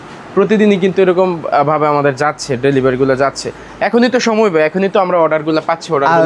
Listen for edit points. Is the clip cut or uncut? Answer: uncut